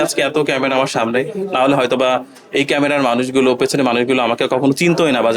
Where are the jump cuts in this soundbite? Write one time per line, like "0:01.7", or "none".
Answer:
none